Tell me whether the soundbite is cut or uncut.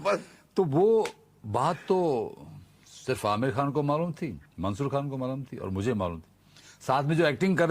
uncut